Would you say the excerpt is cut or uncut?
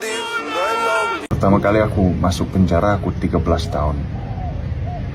cut